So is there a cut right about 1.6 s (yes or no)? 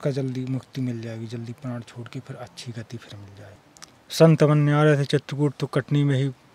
no